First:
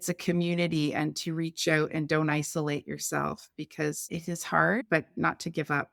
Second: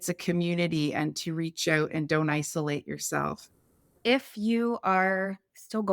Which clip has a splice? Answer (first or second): second